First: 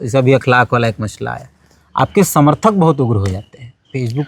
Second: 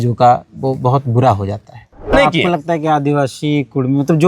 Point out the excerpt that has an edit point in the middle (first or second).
second